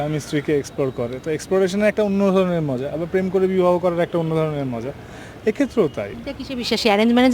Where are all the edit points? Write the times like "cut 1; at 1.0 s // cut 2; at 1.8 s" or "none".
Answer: cut 1; at 6.2 s